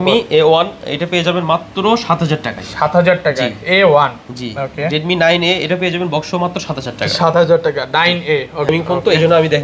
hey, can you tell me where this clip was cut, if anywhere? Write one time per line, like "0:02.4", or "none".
0:08.7